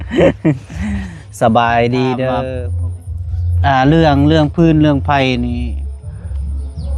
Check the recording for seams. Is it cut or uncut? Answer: cut